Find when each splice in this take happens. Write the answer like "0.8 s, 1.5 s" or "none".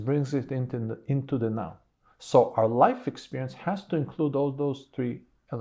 none